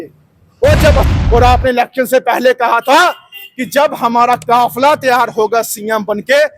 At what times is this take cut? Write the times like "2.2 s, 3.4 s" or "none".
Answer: 1.1 s